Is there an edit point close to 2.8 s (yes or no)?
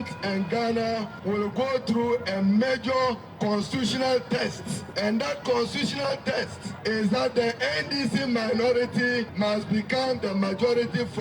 no